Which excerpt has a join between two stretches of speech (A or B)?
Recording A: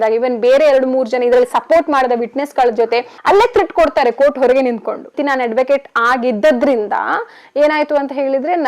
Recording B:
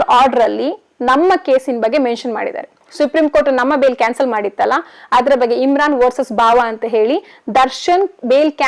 A